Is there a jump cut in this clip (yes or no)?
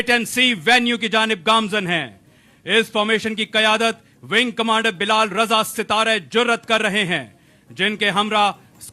no